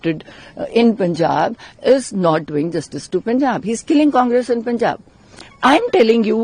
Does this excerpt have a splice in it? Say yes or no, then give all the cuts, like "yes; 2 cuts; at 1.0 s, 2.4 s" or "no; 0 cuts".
no; 0 cuts